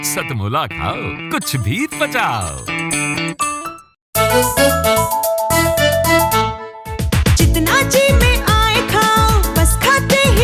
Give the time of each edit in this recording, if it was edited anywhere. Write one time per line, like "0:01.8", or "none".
0:04.0

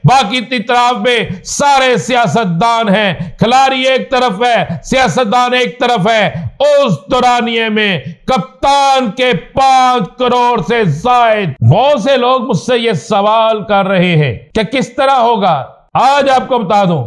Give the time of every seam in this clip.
0:11.5
0:14.4
0:15.8

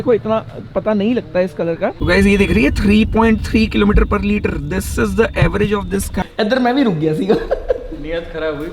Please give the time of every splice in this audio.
0:02.0
0:06.2

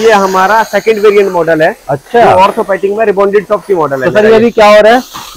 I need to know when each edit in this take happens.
none

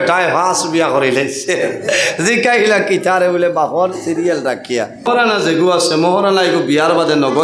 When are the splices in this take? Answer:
0:05.1

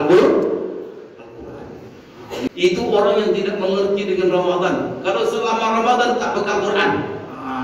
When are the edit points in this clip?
0:02.5

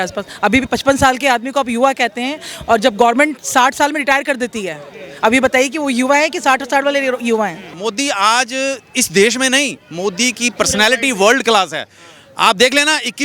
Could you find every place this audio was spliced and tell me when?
0:07.7

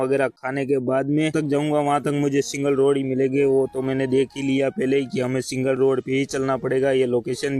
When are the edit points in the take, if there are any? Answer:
0:01.3

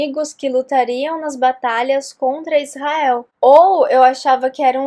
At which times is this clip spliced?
0:03.3

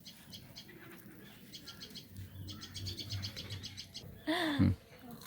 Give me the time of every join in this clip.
0:03.8

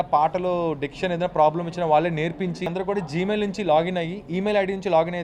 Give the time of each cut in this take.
0:02.7

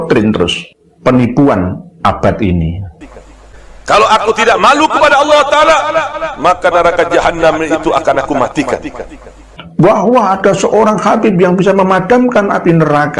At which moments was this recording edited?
0:03.2
0:09.0

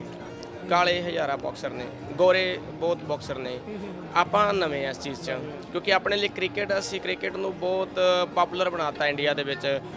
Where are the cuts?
none

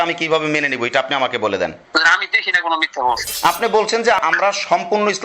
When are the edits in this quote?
0:01.8
0:03.3
0:04.2

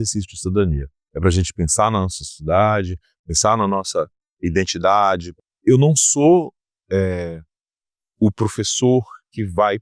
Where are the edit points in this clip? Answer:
0:05.3

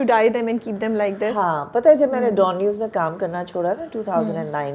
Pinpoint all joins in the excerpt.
none

